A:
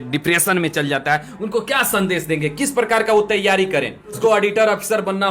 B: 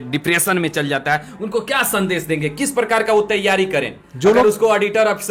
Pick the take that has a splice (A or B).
A